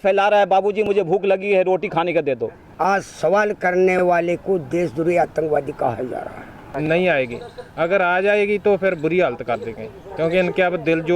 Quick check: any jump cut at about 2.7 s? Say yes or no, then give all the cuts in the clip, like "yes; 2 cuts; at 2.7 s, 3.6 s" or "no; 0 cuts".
yes; 2 cuts; at 2.7 s, 6.9 s